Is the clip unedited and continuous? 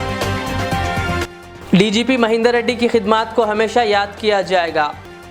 no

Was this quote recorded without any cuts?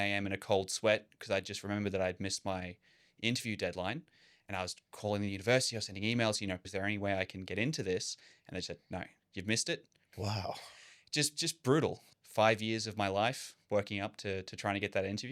no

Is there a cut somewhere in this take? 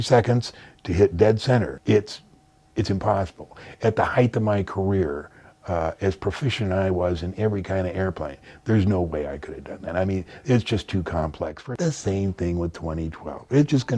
yes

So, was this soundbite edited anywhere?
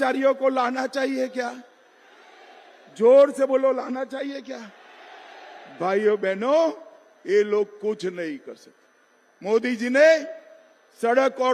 no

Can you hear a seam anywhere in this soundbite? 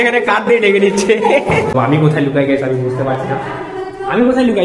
yes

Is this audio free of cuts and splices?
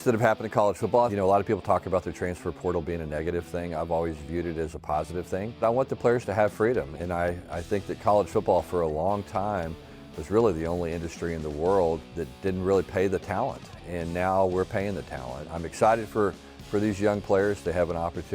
no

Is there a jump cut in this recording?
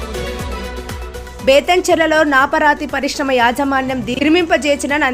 no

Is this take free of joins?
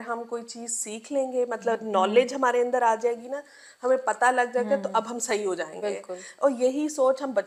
yes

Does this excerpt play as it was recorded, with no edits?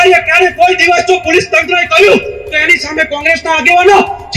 yes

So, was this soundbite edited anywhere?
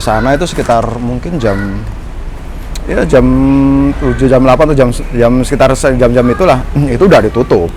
no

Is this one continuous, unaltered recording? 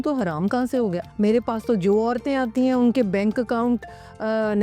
no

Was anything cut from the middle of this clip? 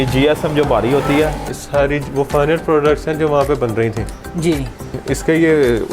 yes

